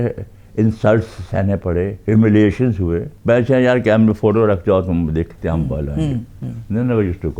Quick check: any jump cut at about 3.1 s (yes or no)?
yes